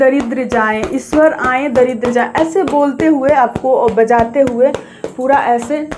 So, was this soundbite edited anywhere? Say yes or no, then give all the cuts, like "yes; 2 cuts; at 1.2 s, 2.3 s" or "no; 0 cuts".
no; 0 cuts